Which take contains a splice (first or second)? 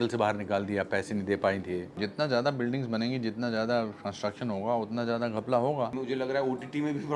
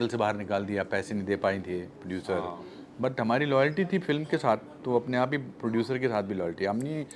first